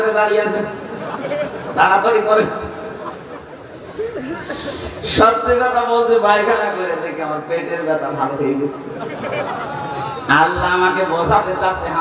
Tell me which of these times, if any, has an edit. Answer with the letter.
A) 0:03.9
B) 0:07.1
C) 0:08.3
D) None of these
D